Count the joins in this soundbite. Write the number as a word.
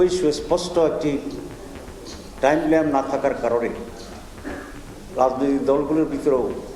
zero